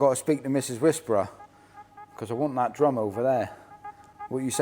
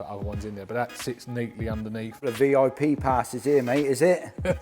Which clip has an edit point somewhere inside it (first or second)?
second